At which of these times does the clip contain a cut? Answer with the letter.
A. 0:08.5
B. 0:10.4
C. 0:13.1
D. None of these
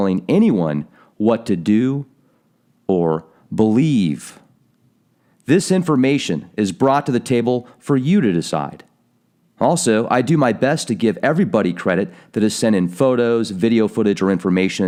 D